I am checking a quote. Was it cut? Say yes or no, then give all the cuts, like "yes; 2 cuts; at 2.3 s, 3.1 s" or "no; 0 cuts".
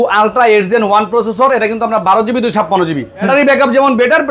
yes; 1 cut; at 3.3 s